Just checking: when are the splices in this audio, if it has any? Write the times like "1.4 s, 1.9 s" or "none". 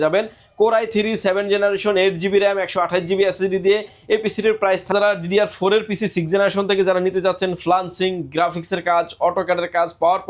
4.9 s

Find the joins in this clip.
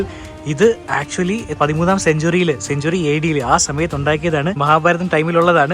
1.6 s, 4.6 s

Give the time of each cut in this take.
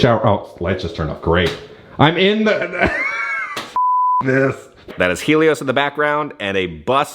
4.9 s

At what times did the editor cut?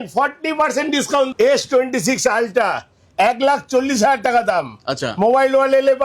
1.3 s

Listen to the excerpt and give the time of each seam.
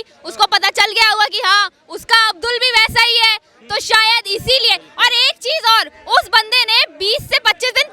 none

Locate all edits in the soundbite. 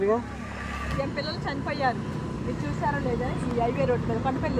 0.9 s

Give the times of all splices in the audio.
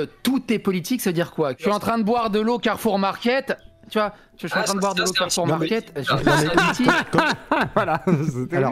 1.6 s

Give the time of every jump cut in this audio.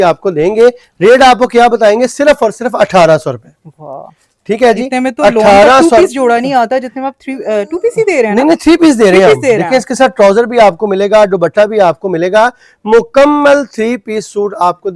none

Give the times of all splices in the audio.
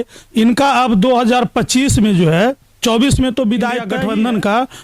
3.9 s

